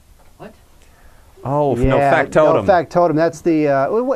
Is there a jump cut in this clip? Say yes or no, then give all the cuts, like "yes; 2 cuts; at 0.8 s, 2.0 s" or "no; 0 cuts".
no; 0 cuts